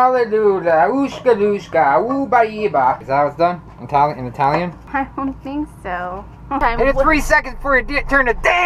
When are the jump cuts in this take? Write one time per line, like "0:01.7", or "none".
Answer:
0:03.0
0:04.8
0:06.6